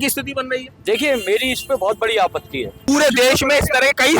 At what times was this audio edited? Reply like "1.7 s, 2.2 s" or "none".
2.8 s